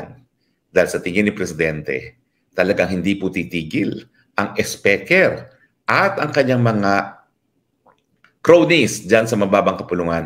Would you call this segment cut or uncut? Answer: uncut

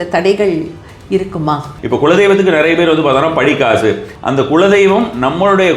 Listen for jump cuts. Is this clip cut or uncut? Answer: cut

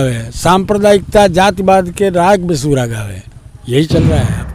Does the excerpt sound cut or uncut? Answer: uncut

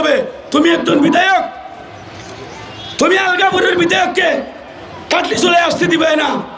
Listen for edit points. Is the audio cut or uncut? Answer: uncut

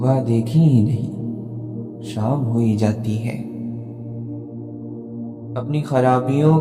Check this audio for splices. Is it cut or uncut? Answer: cut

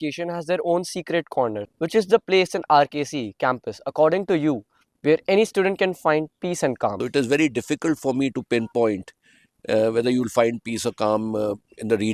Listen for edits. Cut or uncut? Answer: cut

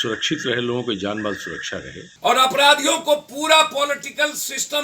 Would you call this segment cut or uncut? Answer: cut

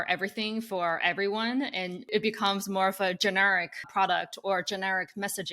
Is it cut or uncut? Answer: cut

